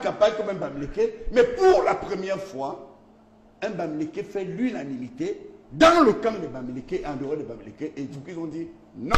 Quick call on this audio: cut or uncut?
uncut